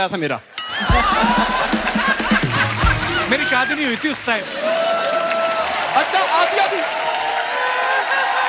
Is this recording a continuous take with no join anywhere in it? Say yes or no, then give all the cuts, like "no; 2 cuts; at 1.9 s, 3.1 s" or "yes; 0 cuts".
yes; 0 cuts